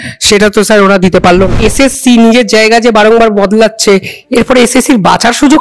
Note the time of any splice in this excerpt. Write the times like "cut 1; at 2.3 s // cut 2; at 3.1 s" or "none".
cut 1; at 1.6 s